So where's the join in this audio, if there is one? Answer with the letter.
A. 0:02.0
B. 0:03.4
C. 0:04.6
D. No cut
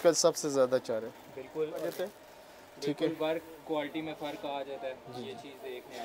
A